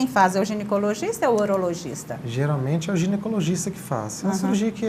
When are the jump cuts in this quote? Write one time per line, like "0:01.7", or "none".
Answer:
none